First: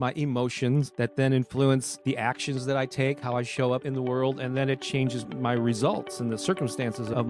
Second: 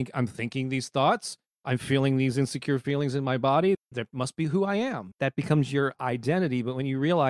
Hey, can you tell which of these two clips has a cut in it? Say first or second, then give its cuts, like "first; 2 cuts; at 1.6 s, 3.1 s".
first; 3 cuts; at 0.9 s, 1.9 s, 3.8 s